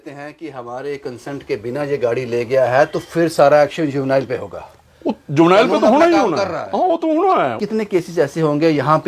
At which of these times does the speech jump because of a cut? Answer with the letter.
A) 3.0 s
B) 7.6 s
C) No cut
B